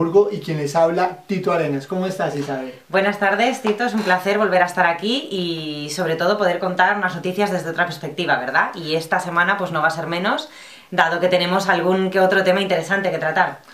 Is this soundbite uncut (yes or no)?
yes